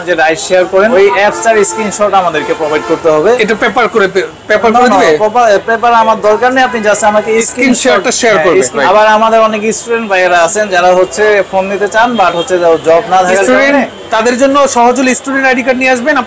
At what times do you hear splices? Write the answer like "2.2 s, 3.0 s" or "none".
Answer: 0.9 s, 8.7 s